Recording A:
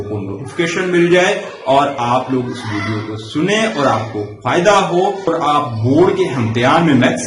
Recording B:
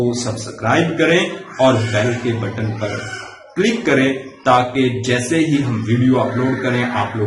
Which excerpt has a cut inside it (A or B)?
A